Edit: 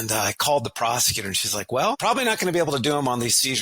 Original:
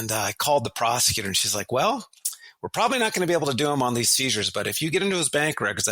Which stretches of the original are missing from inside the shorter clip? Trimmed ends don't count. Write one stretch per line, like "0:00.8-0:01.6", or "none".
0:02.0-0:02.7